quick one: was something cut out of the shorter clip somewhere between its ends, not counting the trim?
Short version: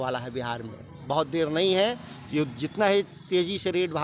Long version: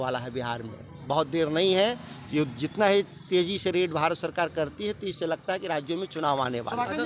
no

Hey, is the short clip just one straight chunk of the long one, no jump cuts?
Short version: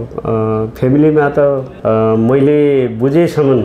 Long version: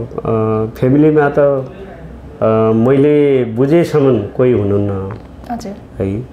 no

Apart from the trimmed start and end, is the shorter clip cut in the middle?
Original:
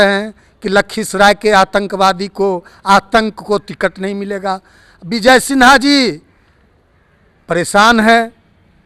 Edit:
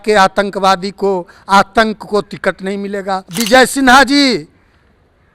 yes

